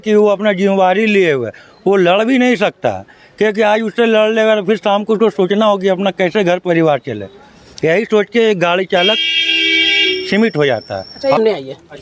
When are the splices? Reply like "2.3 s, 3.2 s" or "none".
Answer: none